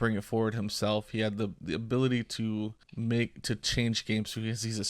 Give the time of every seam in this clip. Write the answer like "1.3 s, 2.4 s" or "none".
2.8 s